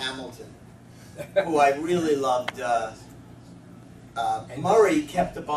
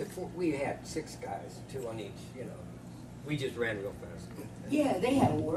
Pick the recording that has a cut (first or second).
second